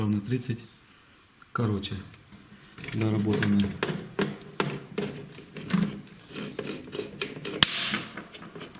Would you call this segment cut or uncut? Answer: uncut